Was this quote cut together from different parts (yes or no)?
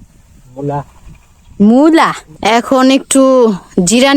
yes